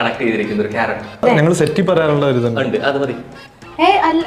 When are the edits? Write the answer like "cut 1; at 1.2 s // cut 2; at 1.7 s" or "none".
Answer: cut 1; at 1.2 s